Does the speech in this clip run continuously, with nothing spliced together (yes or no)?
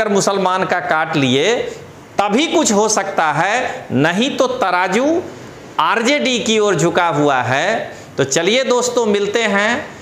yes